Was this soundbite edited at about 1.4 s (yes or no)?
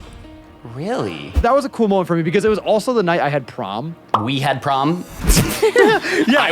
yes